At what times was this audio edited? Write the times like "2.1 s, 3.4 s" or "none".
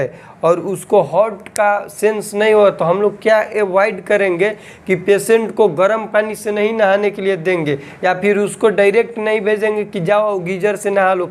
none